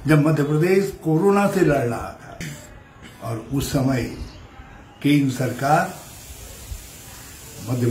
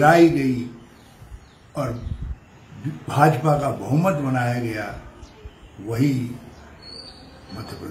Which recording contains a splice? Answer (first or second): first